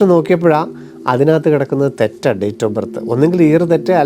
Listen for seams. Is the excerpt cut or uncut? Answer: uncut